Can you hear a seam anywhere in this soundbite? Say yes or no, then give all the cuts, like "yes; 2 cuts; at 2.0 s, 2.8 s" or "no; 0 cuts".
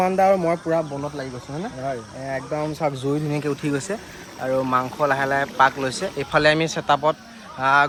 no; 0 cuts